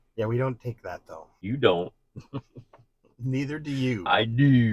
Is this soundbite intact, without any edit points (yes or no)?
yes